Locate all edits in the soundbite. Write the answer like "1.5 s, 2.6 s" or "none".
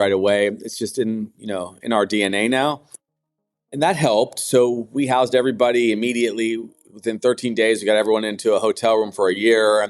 none